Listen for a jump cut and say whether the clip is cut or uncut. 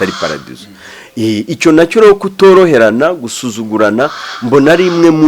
uncut